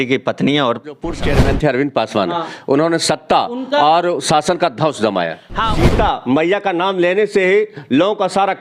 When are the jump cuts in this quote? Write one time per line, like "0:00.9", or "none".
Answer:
0:01.2
0:05.7